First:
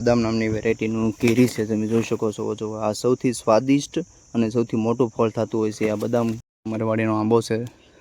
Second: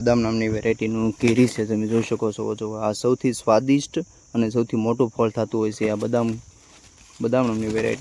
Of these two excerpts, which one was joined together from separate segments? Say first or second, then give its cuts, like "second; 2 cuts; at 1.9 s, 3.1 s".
first; 1 cut; at 6.5 s